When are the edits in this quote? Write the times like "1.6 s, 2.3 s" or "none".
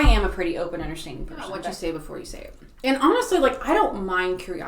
1.6 s

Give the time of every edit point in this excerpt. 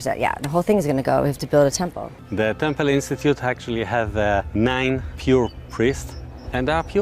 none

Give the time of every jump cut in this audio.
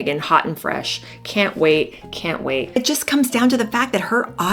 2.6 s

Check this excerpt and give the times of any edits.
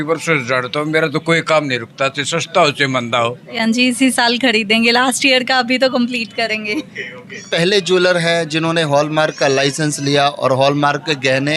3.6 s, 7.5 s

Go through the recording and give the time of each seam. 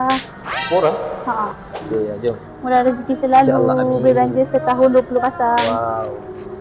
1.8 s

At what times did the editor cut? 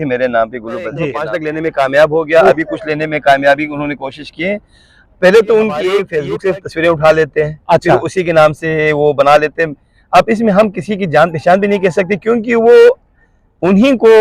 1.2 s, 6.2 s

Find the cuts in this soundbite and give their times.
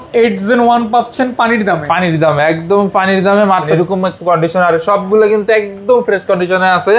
3.7 s

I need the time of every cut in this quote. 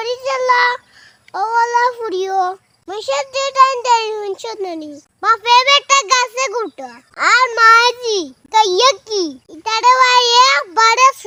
none

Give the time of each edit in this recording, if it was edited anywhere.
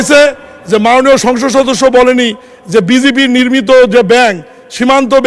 none

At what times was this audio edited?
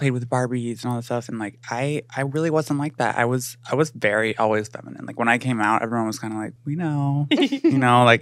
6.6 s

